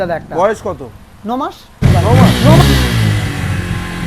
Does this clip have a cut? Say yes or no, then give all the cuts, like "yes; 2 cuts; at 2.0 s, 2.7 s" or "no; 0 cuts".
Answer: yes; 1 cut; at 1.8 s